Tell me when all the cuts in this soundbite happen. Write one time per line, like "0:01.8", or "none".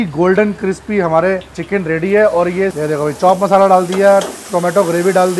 0:01.5
0:02.8